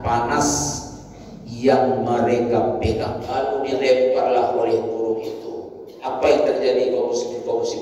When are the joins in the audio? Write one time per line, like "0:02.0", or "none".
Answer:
0:03.3